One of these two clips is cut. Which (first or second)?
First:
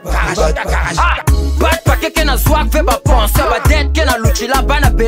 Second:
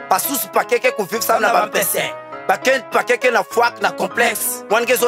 first